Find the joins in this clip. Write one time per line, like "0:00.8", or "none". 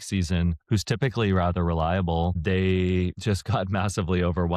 none